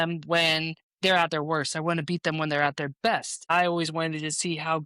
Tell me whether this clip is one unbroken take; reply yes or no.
no